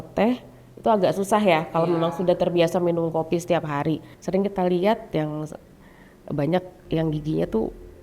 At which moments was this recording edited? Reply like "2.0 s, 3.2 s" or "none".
4.1 s